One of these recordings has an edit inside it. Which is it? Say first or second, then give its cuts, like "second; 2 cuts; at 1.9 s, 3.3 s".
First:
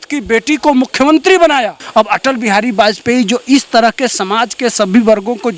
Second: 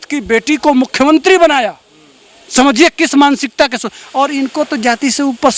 first; 1 cut; at 1.8 s